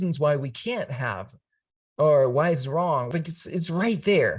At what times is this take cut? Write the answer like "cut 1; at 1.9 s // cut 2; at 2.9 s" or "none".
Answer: cut 1; at 3.1 s